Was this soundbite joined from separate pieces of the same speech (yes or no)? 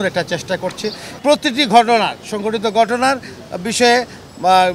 yes